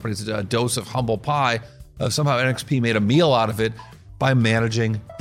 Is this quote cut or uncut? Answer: uncut